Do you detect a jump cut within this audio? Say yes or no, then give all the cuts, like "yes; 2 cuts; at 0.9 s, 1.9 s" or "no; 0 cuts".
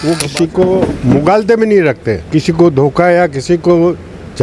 yes; 1 cut; at 2.1 s